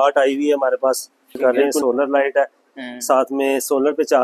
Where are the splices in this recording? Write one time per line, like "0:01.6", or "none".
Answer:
0:01.4